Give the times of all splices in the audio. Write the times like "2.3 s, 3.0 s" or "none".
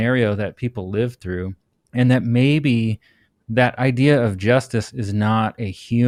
none

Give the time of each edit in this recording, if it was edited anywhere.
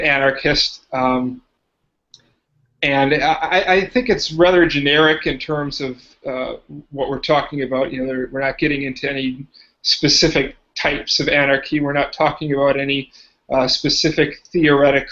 9.1 s

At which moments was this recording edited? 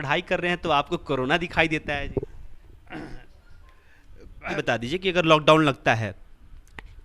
4.6 s

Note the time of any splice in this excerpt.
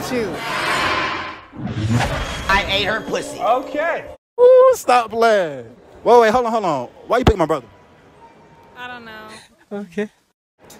none

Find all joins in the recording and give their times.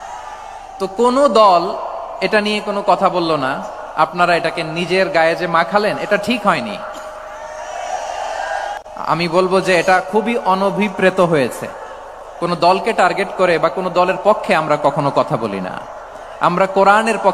8.8 s

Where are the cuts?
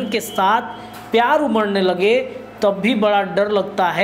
none

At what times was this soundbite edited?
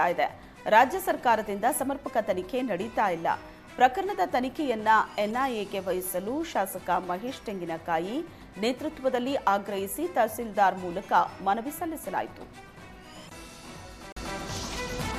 14.2 s

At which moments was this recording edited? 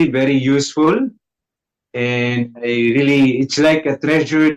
none

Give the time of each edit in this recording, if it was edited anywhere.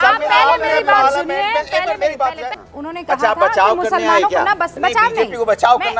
2.5 s

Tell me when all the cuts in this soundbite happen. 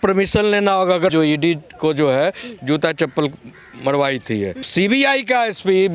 1.1 s, 4.7 s

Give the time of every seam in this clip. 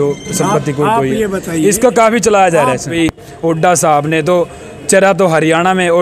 3.0 s

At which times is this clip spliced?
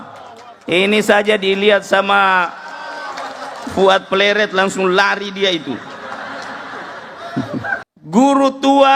7.8 s

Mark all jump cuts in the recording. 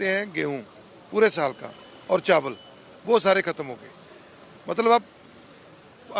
none

